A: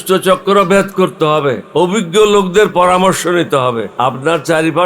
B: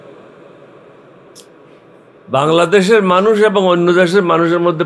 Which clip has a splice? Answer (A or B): A